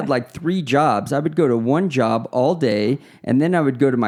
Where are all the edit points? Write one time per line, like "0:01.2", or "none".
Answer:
none